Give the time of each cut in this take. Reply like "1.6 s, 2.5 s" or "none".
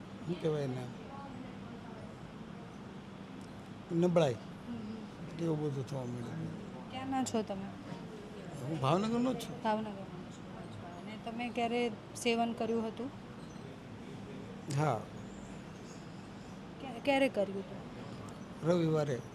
none